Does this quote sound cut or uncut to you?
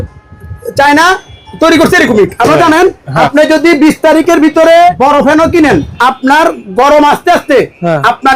cut